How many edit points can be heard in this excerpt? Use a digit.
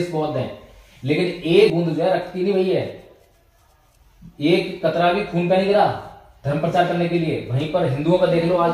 1